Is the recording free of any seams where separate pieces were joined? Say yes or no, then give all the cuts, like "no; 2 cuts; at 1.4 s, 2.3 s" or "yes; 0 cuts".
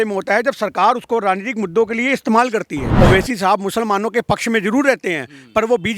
no; 1 cut; at 2.8 s